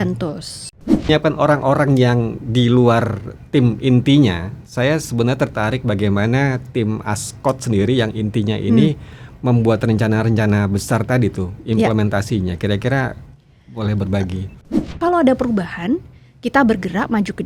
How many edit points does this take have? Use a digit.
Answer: 2